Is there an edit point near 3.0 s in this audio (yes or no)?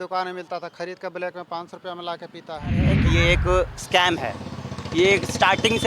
yes